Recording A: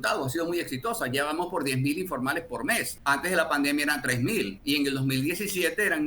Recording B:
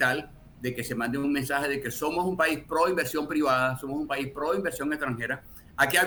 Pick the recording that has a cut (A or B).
A